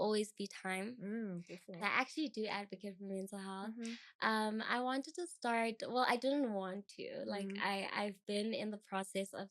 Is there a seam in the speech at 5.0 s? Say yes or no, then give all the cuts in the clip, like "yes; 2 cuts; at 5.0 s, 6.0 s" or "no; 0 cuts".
no; 1 cut; at 1.8 s